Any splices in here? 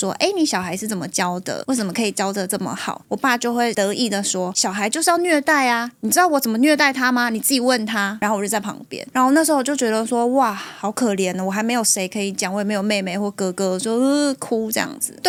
no; 0 cuts

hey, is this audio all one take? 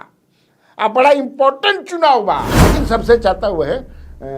no; 1 cut; at 2.5 s

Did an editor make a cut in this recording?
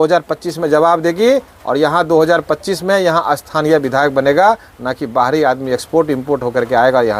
no; 0 cuts

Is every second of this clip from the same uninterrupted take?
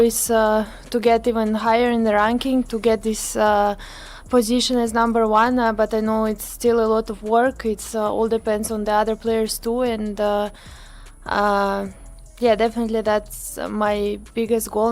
yes; 0 cuts

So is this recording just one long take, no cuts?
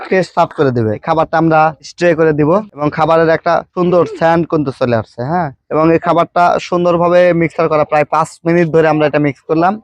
no; 2 cuts; at 1.0 s, 2.7 s

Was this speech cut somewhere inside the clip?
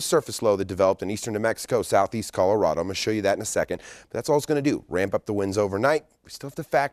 no; 0 cuts

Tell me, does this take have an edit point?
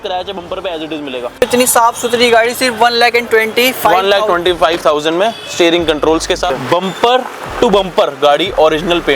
yes; 2 cuts; at 1.4 s, 6.5 s

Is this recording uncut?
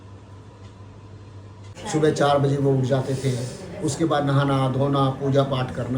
no; 1 cut; at 1.7 s

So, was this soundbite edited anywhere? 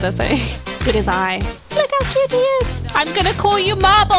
no; 0 cuts

